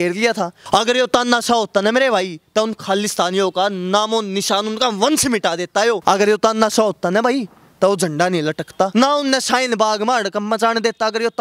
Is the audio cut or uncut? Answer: cut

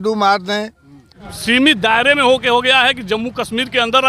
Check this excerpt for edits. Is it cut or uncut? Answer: cut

